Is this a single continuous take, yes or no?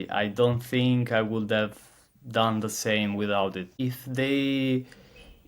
no